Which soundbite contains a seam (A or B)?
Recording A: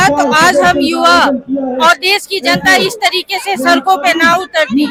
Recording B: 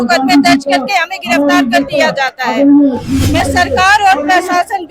B